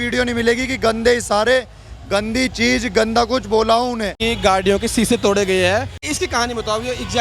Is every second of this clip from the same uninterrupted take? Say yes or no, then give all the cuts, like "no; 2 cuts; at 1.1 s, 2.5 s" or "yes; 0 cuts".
no; 2 cuts; at 4.2 s, 6.1 s